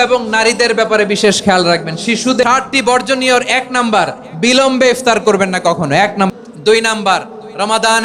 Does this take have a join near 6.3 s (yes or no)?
yes